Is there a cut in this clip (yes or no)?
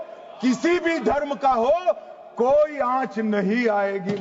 no